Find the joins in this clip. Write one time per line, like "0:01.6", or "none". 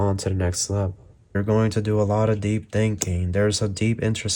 0:01.4